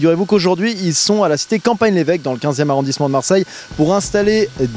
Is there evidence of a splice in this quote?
yes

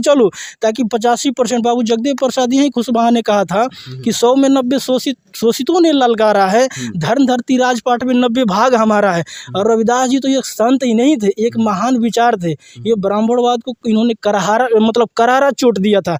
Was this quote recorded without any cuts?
yes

